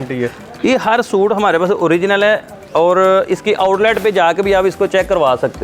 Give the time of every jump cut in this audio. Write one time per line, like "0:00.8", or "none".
none